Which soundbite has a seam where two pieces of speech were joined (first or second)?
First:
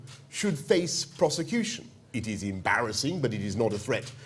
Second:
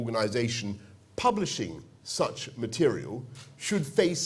first